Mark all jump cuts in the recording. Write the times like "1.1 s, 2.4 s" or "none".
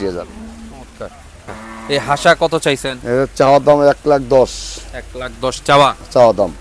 1.4 s